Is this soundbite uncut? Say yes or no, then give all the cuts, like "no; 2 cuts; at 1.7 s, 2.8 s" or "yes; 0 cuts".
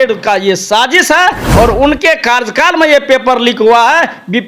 yes; 0 cuts